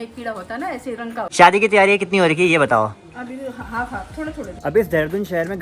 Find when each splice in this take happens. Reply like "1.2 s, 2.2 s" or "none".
1.3 s, 4.6 s